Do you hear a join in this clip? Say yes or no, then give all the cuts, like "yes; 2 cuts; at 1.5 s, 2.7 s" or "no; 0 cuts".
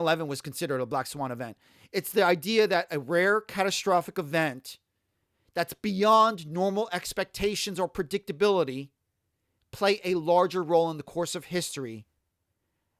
no; 0 cuts